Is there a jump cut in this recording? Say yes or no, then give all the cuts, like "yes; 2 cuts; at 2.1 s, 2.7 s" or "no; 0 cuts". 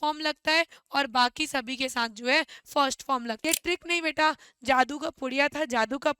yes; 1 cut; at 3.4 s